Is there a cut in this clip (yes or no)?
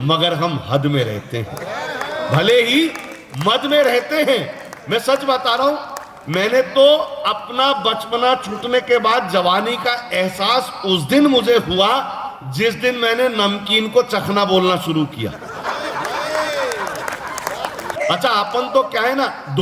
yes